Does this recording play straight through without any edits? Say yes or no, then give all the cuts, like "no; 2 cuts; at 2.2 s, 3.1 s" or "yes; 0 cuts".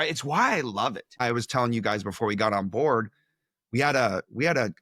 no; 1 cut; at 1.2 s